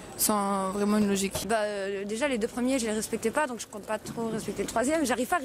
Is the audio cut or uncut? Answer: cut